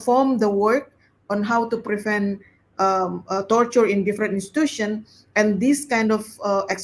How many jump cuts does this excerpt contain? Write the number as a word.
zero